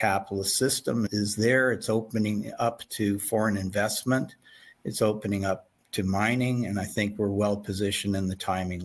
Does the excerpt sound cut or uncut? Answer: uncut